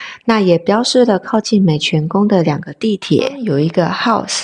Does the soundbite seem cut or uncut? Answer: cut